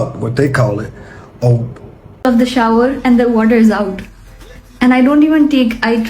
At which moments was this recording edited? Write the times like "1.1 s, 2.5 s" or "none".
2.2 s